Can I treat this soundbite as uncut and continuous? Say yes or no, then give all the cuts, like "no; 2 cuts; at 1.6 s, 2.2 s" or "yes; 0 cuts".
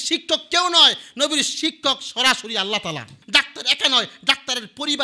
no; 1 cut; at 3.2 s